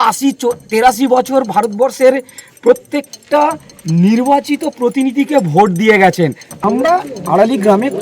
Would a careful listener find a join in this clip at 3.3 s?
no; 1 cut; at 6.6 s

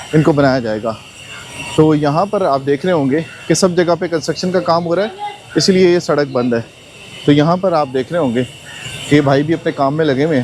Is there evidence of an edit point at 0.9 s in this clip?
no; 0 cuts

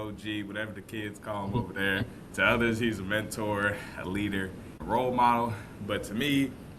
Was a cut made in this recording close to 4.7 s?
yes; 1 cut; at 4.7 s

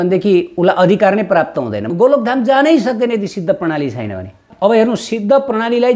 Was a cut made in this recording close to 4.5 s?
yes; 2 cuts; at 1.9 s, 4.5 s

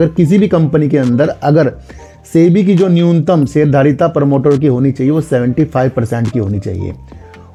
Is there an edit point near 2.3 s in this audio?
no; 0 cuts

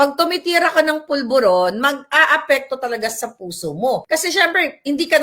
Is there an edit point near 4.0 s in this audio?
yes; 1 cut; at 4.0 s

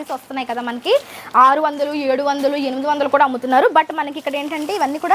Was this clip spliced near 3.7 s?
no; 0 cuts

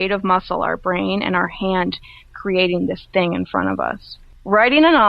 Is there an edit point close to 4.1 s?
yes; 1 cut; at 4.1 s

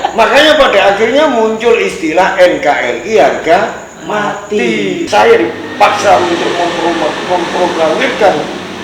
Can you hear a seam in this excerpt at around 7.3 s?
no; 1 cut; at 5.1 s

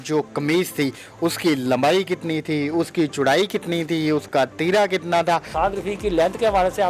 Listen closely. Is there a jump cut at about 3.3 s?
no; 1 cut; at 5.5 s

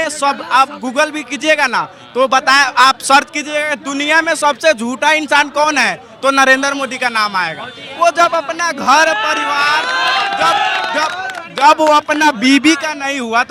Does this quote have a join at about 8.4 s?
no; 0 cuts

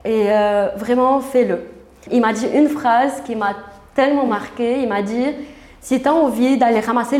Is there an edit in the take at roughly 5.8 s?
no; 1 cut; at 2.0 s

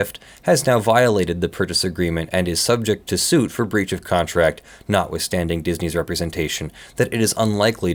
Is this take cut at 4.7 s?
no; 0 cuts

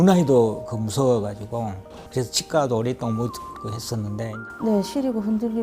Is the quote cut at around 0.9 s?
no; 1 cut; at 4.3 s

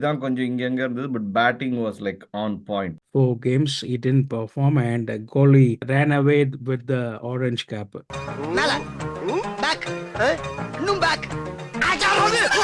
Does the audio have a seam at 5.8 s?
yes; 2 cuts; at 3.0 s, 5.8 s

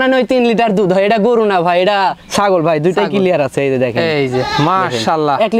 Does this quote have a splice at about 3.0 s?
no; 0 cuts

